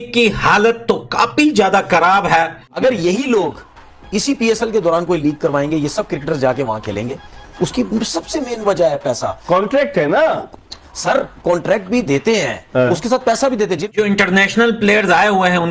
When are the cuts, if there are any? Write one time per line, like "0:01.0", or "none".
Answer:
0:02.8
0:13.9